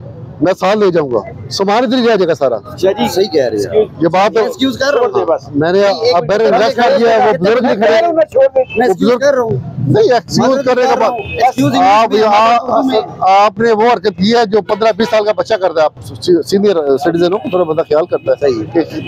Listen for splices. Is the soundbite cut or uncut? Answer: uncut